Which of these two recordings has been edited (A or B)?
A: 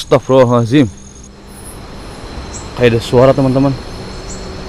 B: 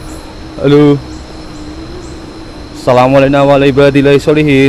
A